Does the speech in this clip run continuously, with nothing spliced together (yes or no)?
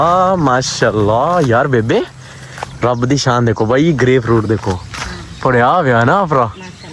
yes